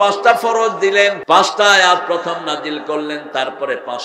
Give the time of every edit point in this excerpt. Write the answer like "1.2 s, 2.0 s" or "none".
1.2 s